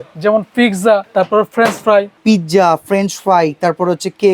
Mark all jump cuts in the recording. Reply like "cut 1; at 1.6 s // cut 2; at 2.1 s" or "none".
cut 1; at 1.1 s // cut 2; at 2.1 s